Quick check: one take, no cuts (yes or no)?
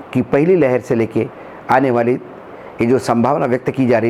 yes